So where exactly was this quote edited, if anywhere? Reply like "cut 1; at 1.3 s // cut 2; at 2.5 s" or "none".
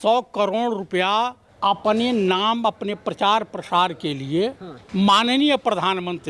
cut 1; at 1.4 s // cut 2; at 4.7 s